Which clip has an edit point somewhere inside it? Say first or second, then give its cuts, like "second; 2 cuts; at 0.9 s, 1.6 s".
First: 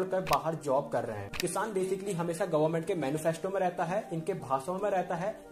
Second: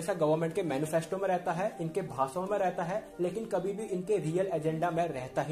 first; 1 cut; at 1.3 s